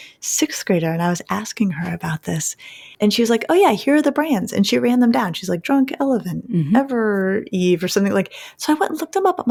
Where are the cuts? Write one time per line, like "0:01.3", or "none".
none

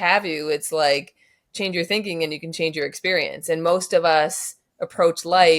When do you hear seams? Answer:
none

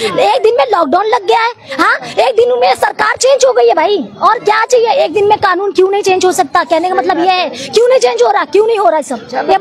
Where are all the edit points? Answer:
none

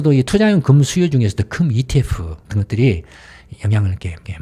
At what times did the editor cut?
0:03.4

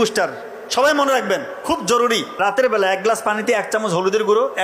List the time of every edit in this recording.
0:02.3

